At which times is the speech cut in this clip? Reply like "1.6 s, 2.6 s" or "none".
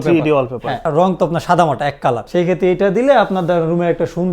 0.9 s, 2.2 s